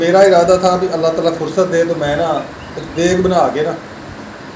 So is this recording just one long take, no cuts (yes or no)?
yes